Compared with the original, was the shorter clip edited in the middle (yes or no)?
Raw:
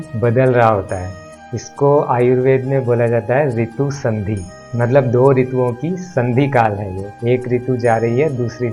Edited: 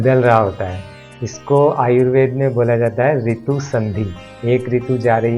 yes